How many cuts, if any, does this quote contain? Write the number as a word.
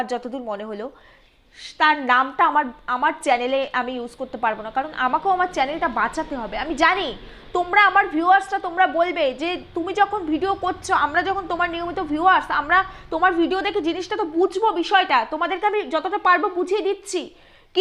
zero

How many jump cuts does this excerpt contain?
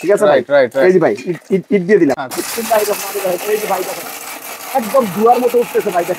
one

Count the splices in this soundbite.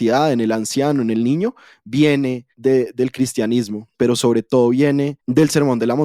three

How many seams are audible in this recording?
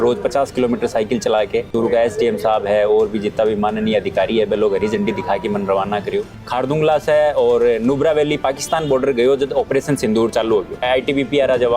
three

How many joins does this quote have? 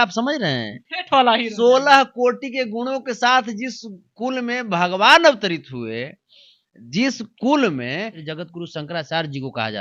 one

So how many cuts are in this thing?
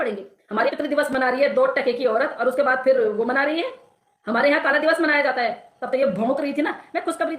two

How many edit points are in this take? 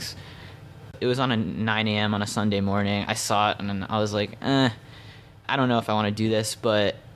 two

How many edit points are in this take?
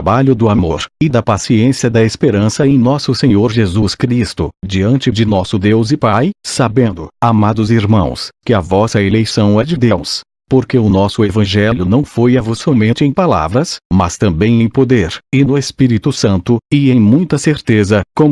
zero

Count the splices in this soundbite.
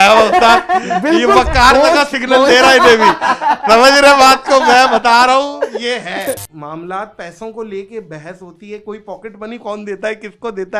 one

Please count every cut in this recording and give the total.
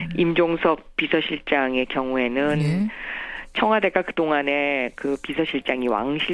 one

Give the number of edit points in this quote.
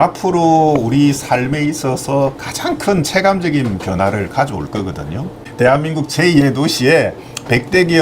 one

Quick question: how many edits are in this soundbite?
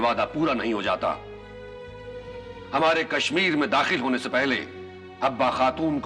one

